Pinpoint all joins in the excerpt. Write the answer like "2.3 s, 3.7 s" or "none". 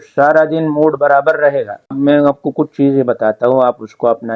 1.9 s